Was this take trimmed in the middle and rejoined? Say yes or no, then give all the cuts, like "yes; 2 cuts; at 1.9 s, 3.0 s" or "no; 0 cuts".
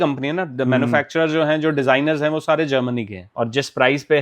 yes; 1 cut; at 3.2 s